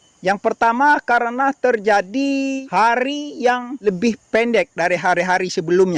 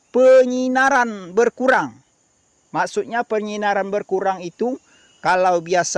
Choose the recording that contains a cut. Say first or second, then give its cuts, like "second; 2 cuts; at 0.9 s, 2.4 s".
first; 2 cuts; at 2.6 s, 3.7 s